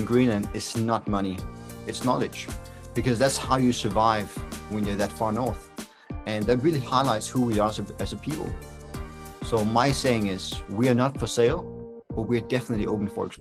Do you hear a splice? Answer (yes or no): no